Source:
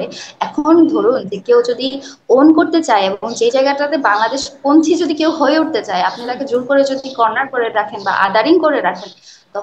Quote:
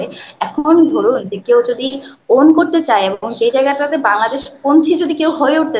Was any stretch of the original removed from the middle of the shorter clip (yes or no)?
no